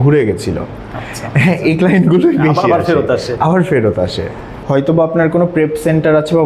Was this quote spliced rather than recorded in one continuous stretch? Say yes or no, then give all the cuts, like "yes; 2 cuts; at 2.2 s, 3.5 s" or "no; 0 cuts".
yes; 1 cut; at 4.5 s